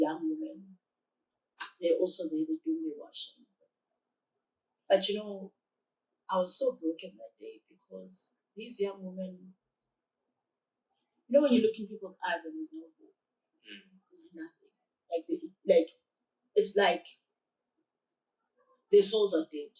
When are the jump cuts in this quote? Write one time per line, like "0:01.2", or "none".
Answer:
none